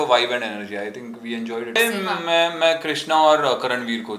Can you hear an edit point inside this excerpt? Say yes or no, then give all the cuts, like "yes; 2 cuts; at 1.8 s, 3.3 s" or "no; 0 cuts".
yes; 1 cut; at 1.8 s